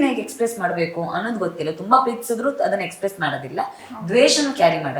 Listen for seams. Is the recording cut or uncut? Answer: uncut